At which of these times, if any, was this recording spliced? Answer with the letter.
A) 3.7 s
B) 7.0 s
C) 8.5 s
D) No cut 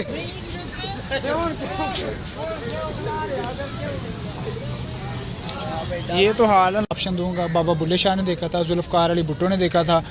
B